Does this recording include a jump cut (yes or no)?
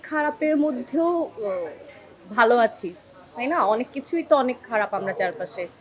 no